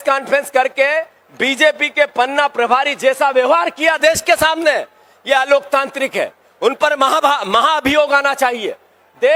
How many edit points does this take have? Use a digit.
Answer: 0